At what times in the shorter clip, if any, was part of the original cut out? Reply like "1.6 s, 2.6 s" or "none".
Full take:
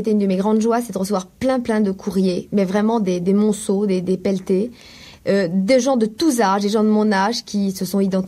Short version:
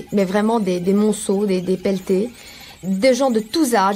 2.8 s